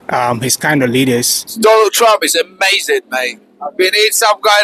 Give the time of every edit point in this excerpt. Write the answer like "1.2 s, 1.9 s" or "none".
1.4 s